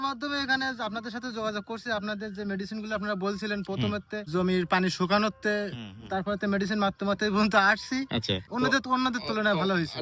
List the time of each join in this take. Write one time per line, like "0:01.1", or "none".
0:04.3
0:08.4